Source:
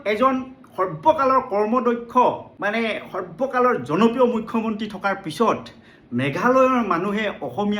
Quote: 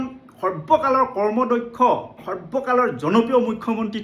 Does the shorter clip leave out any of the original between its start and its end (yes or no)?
yes